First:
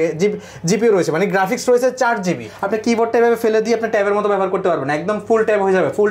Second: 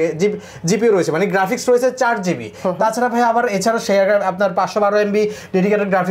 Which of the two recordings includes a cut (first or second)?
first